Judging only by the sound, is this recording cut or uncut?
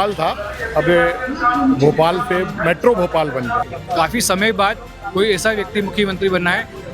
cut